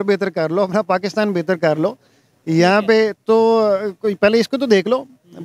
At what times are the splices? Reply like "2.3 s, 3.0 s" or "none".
none